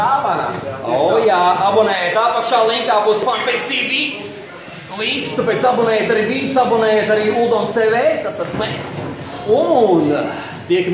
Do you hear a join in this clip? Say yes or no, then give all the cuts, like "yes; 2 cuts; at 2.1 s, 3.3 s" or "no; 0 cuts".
yes; 1 cut; at 6.1 s